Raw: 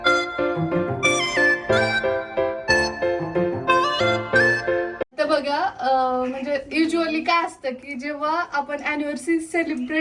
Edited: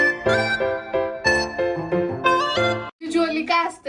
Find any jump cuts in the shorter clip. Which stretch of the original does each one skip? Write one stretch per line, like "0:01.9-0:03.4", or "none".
0:04.4-0:06.7